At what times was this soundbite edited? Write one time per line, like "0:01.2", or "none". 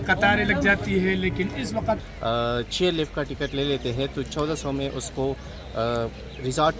0:02.1